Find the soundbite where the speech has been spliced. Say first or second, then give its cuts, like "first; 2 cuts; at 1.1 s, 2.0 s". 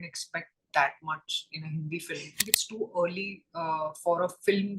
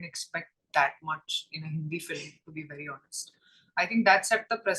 first; 1 cut; at 2.4 s